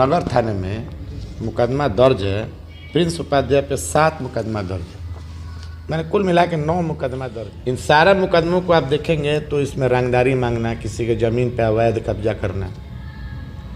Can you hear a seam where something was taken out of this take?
yes; 1 cut; at 7.2 s

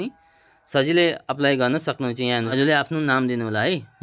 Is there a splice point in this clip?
yes; 1 cut; at 2.5 s

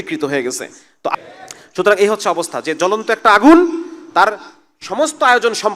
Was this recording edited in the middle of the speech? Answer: yes; 1 cut; at 1.1 s

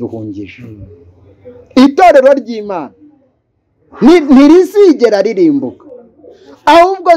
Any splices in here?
no; 0 cuts

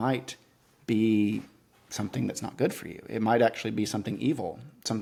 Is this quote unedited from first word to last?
yes; 0 cuts

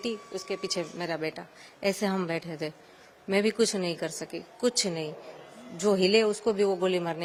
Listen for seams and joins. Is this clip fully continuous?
yes; 0 cuts

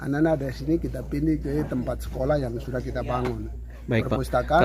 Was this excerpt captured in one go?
yes; 0 cuts

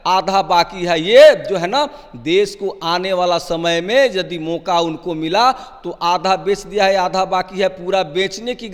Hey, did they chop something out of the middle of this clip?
no; 0 cuts

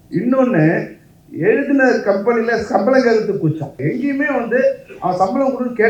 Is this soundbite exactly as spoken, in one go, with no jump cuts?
no; 1 cut; at 3.8 s

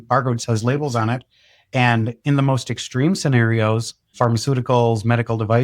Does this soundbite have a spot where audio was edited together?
yes; 1 cut; at 4.0 s

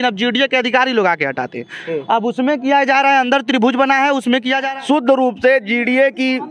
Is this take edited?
yes; 1 cut; at 4.6 s

